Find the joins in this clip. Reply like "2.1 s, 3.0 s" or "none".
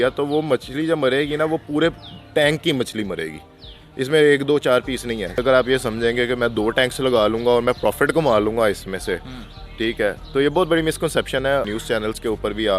5.4 s, 11.7 s